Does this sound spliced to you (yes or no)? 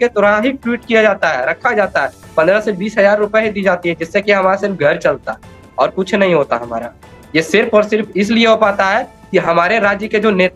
no